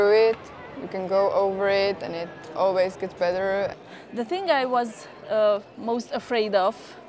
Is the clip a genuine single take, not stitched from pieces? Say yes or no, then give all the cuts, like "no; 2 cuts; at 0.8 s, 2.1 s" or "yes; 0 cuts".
no; 1 cut; at 3.8 s